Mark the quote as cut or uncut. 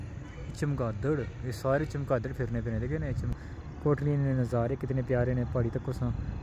cut